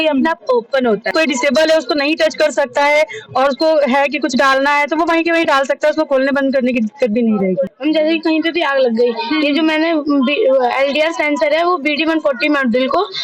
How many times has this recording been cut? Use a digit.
2